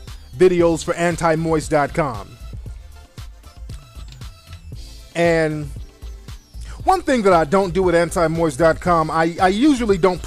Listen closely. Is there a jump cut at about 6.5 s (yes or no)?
no